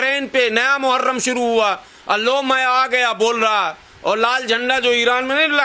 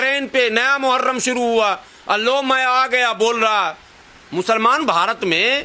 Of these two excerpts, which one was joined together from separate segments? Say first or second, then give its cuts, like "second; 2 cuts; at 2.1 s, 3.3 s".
second; 1 cut; at 3.9 s